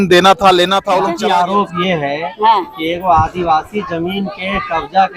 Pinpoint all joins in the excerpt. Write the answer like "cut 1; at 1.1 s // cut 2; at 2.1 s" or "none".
cut 1; at 1.1 s